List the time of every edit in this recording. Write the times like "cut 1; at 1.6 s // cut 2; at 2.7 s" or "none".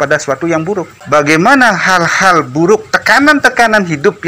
cut 1; at 0.9 s